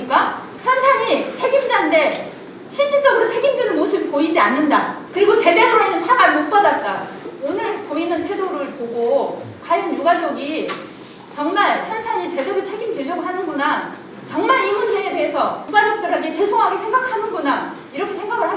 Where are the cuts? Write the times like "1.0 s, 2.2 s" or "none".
5.0 s, 7.3 s, 15.6 s